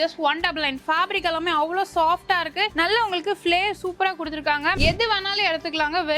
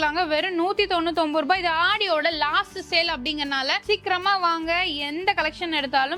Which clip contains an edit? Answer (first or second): first